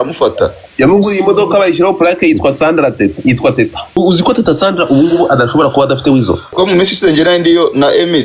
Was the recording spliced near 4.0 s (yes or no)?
yes